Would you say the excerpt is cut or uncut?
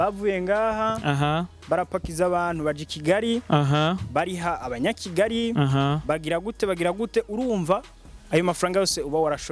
uncut